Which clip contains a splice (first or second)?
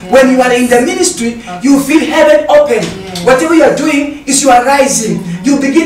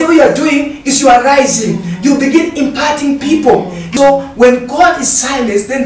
second